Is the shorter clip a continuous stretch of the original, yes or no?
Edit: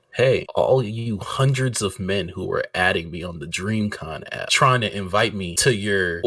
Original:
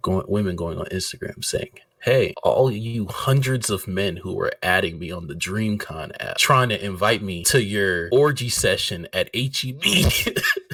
yes